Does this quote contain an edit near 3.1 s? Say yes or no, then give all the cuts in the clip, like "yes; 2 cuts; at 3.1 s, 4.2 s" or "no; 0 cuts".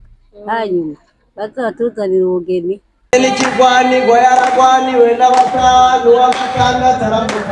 yes; 1 cut; at 3.1 s